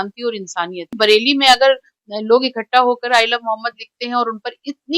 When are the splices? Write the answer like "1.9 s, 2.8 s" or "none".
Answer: 0.9 s